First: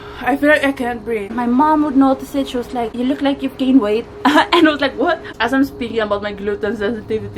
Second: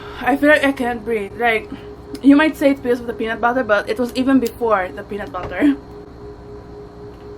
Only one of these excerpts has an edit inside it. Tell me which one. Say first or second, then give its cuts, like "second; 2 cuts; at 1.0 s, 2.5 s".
first; 3 cuts; at 1.3 s, 2.9 s, 5.2 s